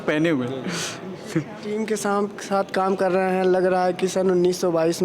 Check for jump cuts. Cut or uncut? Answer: cut